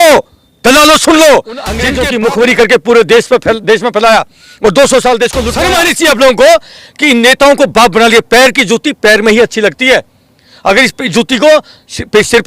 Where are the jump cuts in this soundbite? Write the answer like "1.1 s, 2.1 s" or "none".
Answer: 1.8 s, 5.5 s